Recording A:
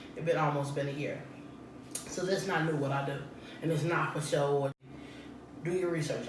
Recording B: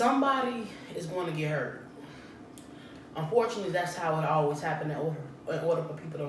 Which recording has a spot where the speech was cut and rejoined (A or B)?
A